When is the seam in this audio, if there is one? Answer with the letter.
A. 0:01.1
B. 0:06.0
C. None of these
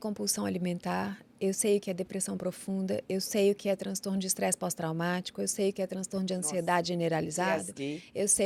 C